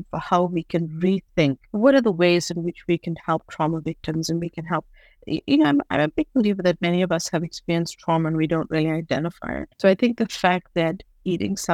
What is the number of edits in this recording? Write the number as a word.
two